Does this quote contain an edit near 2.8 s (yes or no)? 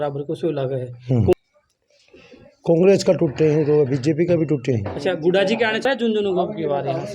no